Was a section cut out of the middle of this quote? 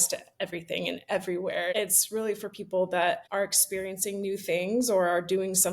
yes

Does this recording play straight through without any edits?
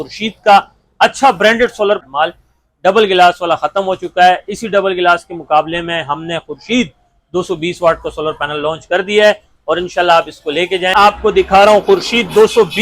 no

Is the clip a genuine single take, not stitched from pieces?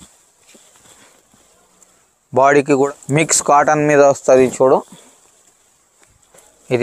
no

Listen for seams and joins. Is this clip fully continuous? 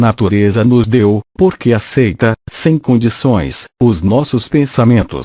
no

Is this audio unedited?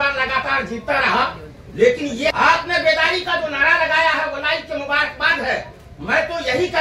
no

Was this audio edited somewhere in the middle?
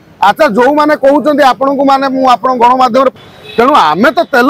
yes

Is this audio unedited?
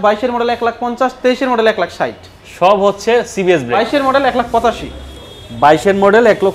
no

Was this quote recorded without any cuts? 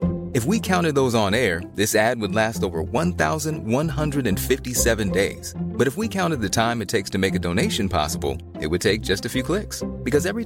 yes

